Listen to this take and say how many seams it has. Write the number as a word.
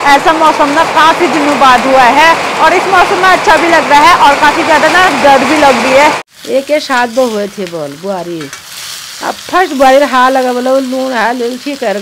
one